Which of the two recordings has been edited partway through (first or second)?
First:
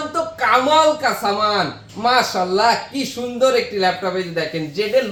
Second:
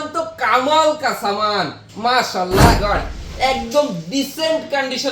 second